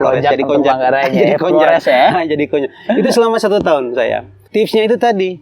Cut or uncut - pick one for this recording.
cut